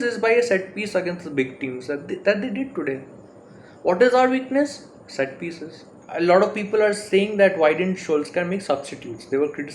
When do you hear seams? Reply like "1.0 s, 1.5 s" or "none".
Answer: 6.0 s